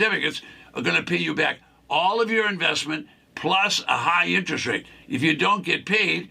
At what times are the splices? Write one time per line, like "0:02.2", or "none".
0:05.0